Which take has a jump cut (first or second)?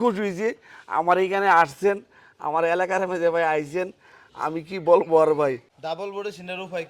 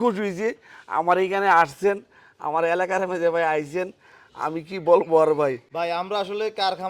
first